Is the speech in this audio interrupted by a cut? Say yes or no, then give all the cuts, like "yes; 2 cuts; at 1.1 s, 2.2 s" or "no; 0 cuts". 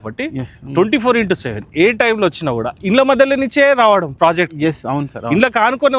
no; 0 cuts